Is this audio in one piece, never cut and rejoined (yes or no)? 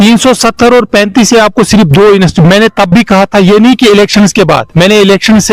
yes